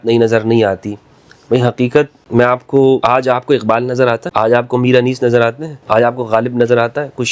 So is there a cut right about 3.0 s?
yes; 4 cuts; at 2.2 s, 3.0 s, 4.3 s, 5.7 s

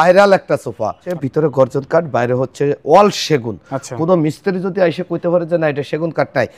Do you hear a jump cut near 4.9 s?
no; 1 cut; at 1.1 s

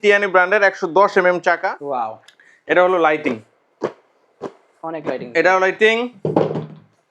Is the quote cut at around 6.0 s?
no; 1 cut; at 1.7 s

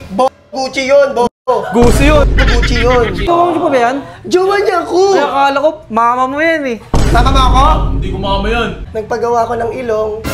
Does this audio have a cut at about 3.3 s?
yes; 2 cuts; at 3.3 s, 8.8 s

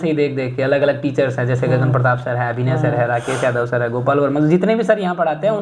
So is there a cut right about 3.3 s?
no; 0 cuts

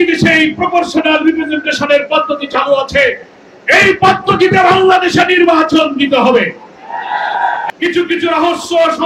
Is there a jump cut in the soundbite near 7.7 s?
yes; 1 cut; at 7.7 s

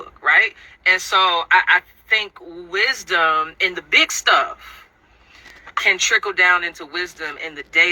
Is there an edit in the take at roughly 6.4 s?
yes; 1 cut; at 6.4 s

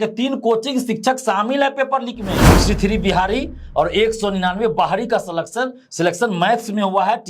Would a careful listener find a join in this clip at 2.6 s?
yes; 1 cut; at 2.6 s

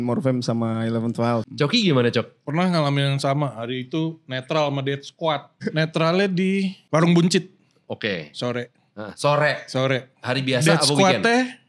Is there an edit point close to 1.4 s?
yes; 1 cut; at 1.4 s

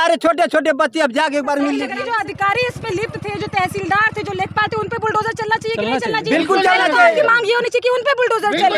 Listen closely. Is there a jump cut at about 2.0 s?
yes; 1 cut; at 2.0 s

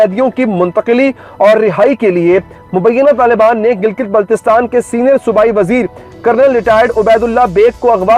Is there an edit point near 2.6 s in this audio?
no; 0 cuts

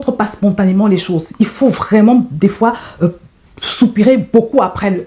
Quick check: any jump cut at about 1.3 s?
no; 0 cuts

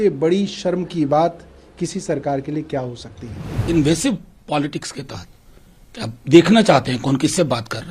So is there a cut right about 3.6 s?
yes; 1 cut; at 3.6 s

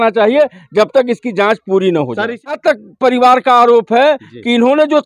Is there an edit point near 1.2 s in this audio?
no; 1 cut; at 2.6 s

